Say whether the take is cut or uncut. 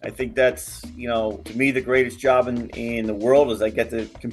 cut